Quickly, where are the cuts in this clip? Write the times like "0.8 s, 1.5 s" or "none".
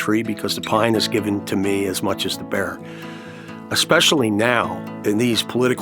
4.8 s